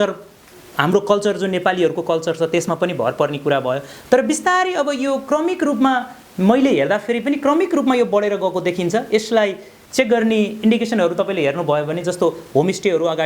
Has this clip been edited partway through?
no; 0 cuts

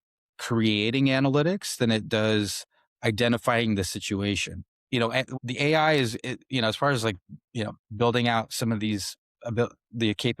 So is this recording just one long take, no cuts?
no; 1 cut; at 5.1 s

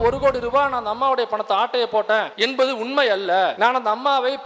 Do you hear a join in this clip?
yes; 2 cuts; at 2.3 s, 3.5 s

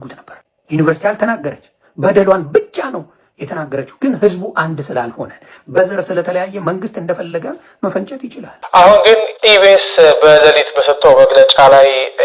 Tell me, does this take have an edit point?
yes; 1 cut; at 8.6 s

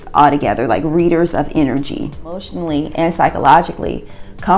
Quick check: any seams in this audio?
yes; 1 cut; at 2.5 s

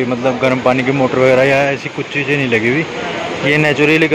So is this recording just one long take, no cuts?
yes; 0 cuts

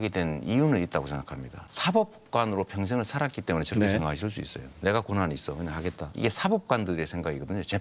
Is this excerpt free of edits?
no; 3 cuts; at 1.7 s, 4.6 s, 6.1 s

